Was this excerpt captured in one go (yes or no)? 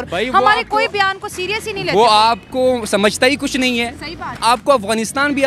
no